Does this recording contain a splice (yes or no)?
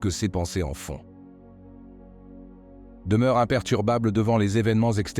yes